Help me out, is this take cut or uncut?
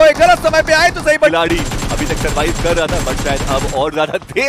cut